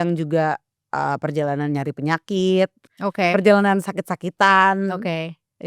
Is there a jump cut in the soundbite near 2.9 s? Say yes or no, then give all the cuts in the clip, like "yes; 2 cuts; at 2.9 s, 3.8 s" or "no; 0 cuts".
yes; 1 cut; at 2.9 s